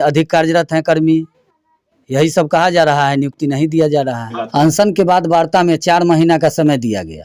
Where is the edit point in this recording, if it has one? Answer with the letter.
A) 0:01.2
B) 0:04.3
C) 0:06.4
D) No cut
B